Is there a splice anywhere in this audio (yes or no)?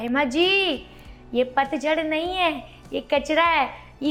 no